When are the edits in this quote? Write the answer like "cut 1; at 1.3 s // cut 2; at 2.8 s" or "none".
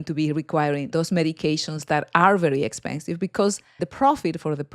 cut 1; at 0.9 s // cut 2; at 3.8 s